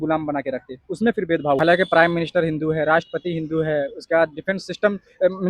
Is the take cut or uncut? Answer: cut